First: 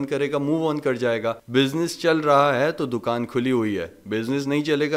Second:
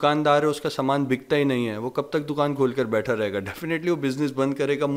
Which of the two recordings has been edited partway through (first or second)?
first